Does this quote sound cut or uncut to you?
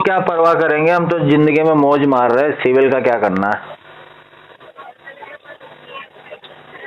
uncut